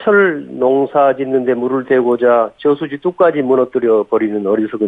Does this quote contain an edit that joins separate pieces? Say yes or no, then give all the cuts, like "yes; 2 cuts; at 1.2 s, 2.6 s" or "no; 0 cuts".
no; 0 cuts